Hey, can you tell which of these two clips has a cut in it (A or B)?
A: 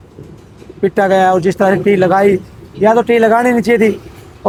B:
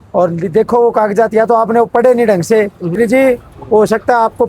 B